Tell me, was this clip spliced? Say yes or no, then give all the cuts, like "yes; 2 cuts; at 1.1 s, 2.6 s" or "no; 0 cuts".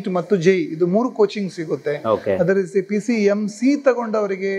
no; 0 cuts